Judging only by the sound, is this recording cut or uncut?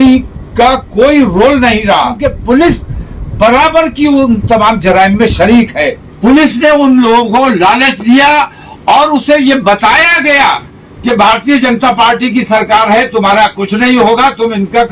cut